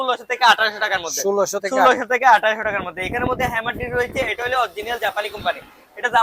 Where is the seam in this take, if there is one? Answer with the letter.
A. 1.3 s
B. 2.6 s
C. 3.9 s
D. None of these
D